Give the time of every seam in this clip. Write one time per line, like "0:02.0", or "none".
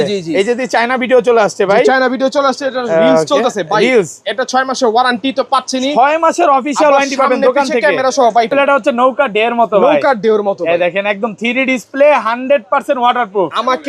0:08.5